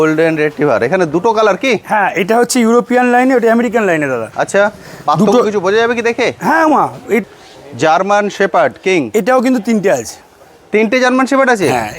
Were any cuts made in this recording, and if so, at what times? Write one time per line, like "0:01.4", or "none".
0:07.2